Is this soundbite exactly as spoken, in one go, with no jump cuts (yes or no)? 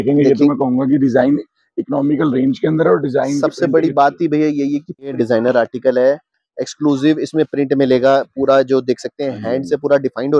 no